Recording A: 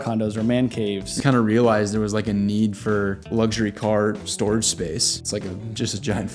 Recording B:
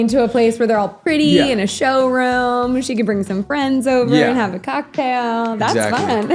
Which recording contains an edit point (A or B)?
A